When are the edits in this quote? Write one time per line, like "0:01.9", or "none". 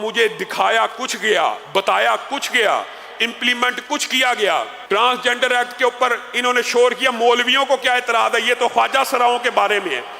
0:04.8